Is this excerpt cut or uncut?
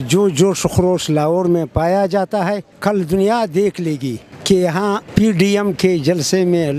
uncut